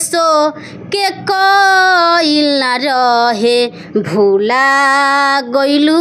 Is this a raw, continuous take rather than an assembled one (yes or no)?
yes